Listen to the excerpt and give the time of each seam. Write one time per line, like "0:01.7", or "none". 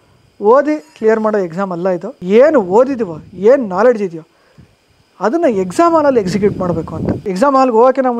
0:02.1
0:07.2